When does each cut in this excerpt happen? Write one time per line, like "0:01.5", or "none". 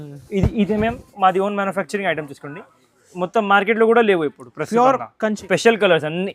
0:05.4

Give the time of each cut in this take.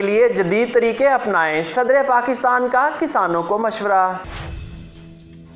0:04.4

